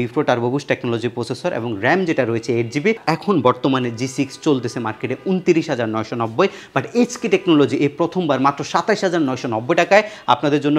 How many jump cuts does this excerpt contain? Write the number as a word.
one